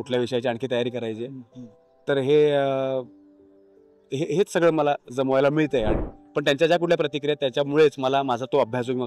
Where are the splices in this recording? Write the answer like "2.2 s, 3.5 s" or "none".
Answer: 5.9 s